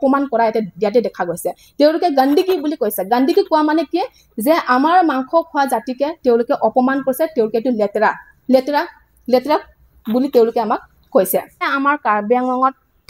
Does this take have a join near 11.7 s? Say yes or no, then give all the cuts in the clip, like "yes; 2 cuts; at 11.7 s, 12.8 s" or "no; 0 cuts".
yes; 1 cut; at 11.7 s